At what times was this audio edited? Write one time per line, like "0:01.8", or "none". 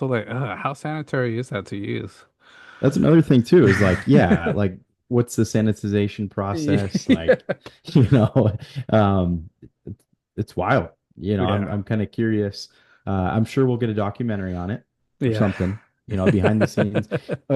none